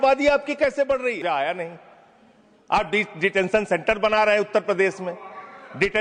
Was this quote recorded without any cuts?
no; 1 cut; at 1.2 s

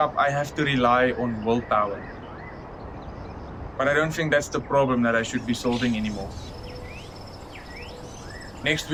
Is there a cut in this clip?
no; 0 cuts

